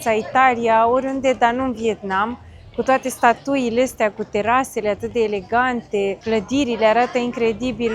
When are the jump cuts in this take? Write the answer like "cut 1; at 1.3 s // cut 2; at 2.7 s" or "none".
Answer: none

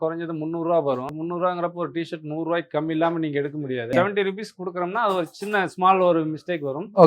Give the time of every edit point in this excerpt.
cut 1; at 1.1 s // cut 2; at 3.9 s

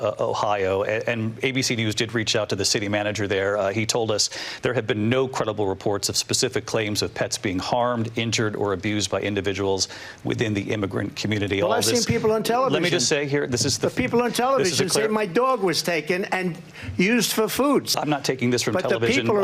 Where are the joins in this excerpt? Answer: cut 1; at 17.9 s

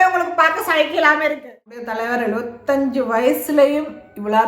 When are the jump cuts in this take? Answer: cut 1; at 1.9 s

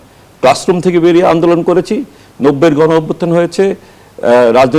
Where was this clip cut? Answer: none

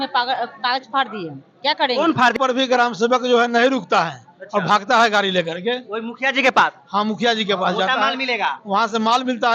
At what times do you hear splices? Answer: cut 1; at 2.3 s

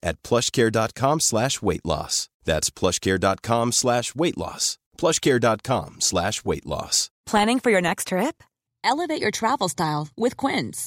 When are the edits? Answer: cut 1; at 7.2 s

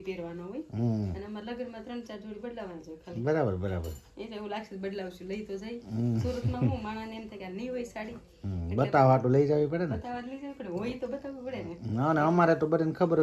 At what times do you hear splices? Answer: none

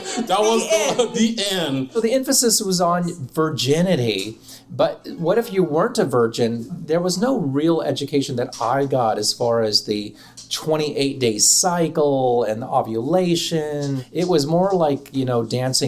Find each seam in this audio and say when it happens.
cut 1; at 1.9 s // cut 2; at 6.6 s // cut 3; at 14.0 s

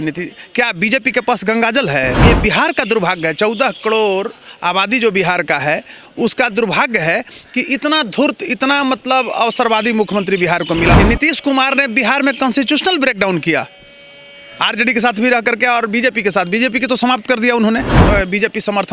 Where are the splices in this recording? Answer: cut 1; at 2.2 s // cut 2; at 10.9 s // cut 3; at 18.0 s

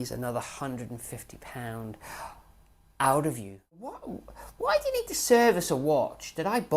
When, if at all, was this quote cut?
cut 1; at 3.9 s

